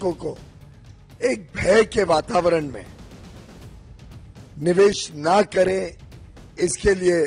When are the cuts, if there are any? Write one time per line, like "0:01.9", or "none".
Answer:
none